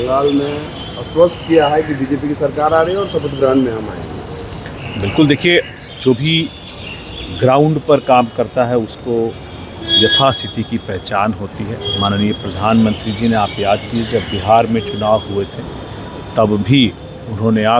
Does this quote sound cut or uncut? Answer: uncut